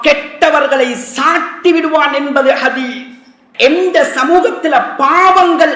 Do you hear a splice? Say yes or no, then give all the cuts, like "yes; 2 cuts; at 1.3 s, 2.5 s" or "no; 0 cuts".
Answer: yes; 1 cut; at 3.4 s